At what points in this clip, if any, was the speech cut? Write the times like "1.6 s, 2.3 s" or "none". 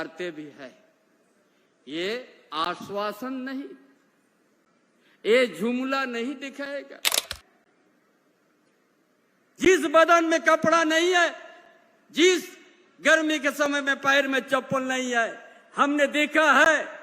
7.2 s

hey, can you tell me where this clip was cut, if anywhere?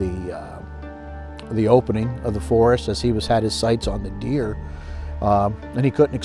none

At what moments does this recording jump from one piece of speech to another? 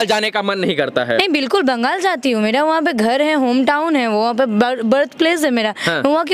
none

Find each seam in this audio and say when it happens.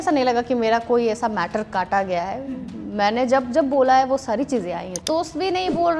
5.0 s

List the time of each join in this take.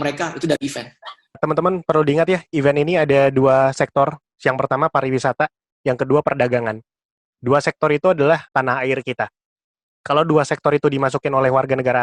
1.2 s, 4.2 s, 8.5 s

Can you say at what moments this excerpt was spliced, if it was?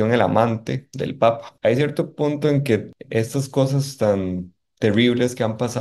1.5 s, 3.0 s

